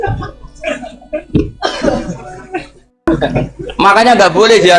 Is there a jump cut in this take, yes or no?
yes